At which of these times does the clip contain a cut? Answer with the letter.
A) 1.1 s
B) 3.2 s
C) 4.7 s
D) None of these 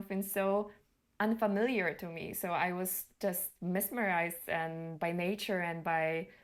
D